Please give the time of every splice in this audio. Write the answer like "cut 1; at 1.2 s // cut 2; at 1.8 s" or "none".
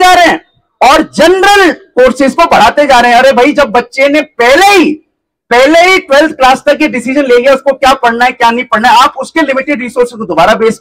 none